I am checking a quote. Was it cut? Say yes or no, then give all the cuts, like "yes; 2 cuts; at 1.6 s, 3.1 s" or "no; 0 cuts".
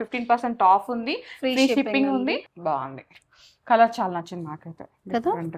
yes; 1 cut; at 2.5 s